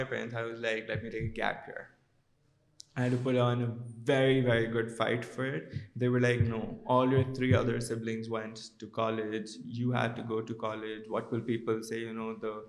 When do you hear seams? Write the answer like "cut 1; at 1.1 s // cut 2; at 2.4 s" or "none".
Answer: none